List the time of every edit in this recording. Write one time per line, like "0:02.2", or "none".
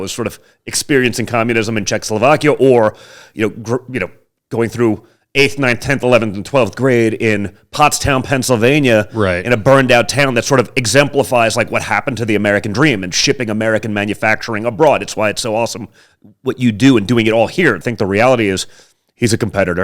0:17.8